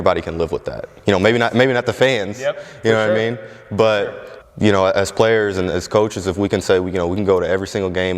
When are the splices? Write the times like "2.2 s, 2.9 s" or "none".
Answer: 4.2 s